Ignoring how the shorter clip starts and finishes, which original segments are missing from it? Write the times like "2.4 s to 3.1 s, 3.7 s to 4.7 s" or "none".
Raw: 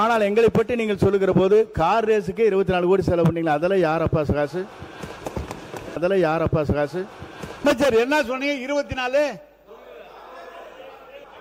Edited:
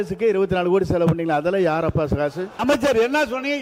4.7 s to 7.5 s

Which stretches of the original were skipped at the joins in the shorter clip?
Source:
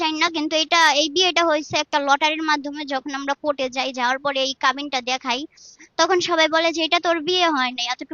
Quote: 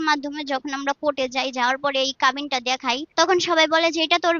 5.5 s to 5.9 s

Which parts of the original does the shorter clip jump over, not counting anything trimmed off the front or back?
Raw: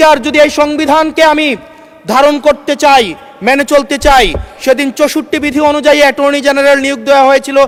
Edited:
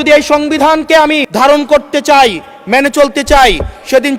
1.5 s to 2.0 s

